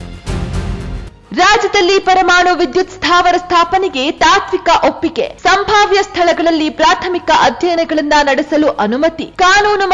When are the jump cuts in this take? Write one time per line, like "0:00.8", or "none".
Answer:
0:01.0